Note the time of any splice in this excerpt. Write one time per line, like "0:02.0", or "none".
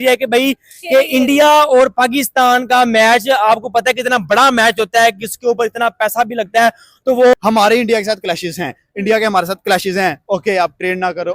0:07.3